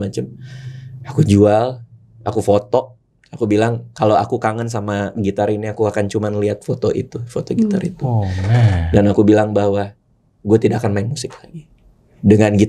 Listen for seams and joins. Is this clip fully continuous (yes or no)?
yes